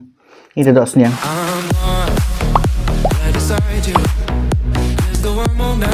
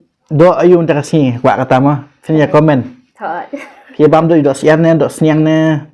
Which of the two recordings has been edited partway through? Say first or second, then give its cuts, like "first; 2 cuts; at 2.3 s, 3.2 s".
first; 1 cut; at 1.2 s